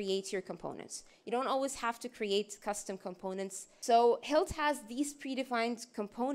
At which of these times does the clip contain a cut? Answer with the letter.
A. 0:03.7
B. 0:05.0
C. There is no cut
A